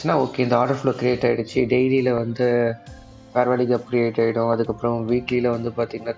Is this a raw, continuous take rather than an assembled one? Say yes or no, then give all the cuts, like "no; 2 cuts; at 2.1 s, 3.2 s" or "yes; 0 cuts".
yes; 0 cuts